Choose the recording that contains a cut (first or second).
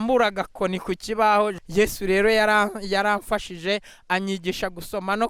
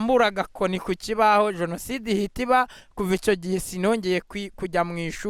first